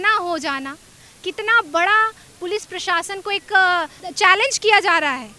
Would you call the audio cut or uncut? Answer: cut